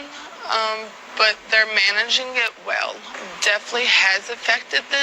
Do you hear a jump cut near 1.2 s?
no; 1 cut; at 3.1 s

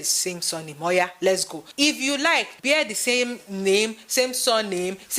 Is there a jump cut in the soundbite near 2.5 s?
yes; 1 cut; at 2.5 s

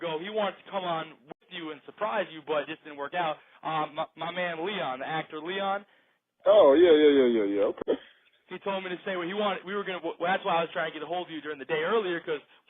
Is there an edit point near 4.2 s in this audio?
no; 1 cut; at 2.3 s

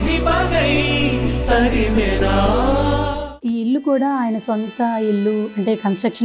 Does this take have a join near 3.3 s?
yes; 1 cut; at 3.3 s

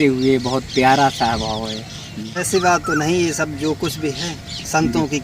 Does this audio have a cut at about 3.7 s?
no; 1 cut; at 2.4 s

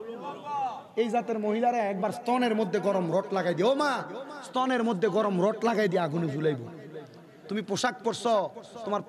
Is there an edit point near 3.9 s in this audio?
no; 0 cuts

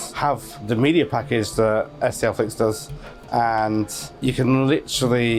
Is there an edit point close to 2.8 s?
no; 0 cuts

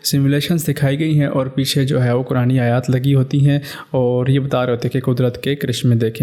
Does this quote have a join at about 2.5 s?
no; 0 cuts

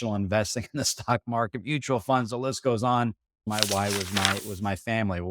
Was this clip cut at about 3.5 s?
yes; 1 cut; at 3.5 s

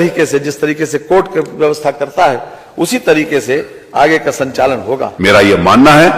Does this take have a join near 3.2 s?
no; 1 cut; at 5.1 s

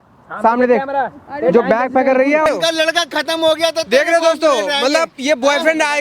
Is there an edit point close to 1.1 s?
no; 1 cut; at 2.5 s

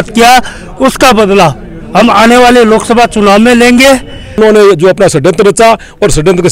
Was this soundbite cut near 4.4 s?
yes; 1 cut; at 4.4 s

